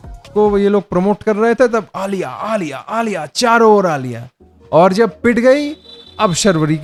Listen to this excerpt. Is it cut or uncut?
uncut